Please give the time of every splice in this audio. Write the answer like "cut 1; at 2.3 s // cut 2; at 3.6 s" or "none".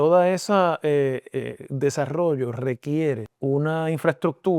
cut 1; at 3.3 s